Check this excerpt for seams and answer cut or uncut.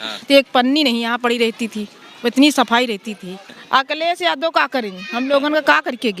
cut